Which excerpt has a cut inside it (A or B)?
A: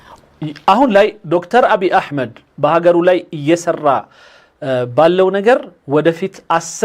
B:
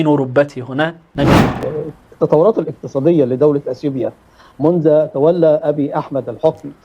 B